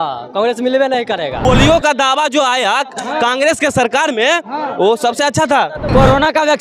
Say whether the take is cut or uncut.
cut